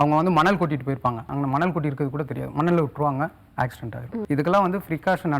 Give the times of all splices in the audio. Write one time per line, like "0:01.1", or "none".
0:01.3
0:04.1